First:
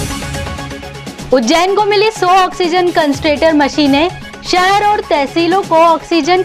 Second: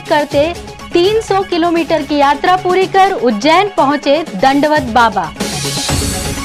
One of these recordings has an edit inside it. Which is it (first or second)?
first